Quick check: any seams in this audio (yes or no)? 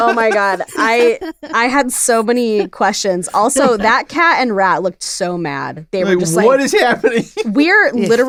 no